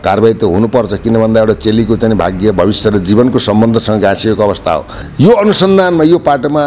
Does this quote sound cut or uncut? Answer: cut